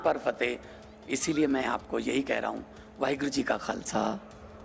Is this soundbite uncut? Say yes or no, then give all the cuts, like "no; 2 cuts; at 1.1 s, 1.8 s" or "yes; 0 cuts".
yes; 0 cuts